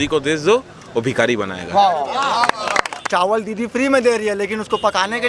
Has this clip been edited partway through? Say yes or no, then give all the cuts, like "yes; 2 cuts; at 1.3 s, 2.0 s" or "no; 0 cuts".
yes; 1 cut; at 3.0 s